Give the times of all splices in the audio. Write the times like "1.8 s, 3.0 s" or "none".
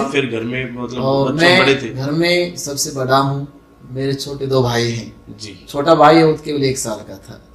none